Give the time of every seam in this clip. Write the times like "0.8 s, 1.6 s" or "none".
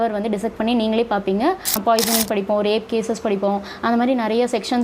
1.8 s